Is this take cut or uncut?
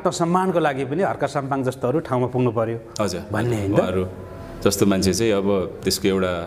uncut